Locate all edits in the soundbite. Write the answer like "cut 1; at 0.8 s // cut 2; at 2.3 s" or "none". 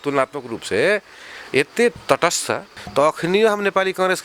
cut 1; at 2.8 s